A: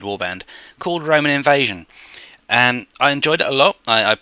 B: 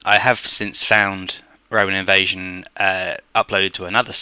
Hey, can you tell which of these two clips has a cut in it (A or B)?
B